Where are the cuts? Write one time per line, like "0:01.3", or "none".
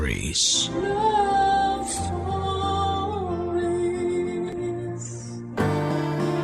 0:05.5